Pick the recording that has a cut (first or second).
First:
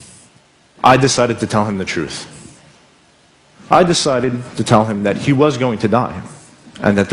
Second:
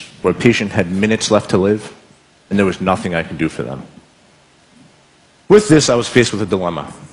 second